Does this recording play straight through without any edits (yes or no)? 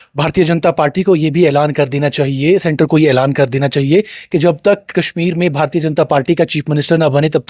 yes